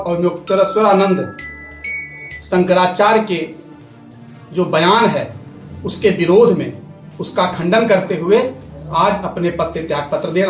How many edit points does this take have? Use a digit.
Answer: 0